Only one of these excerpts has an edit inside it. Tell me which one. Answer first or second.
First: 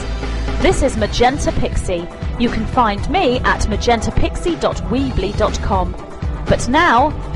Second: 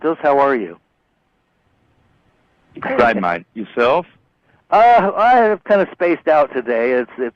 second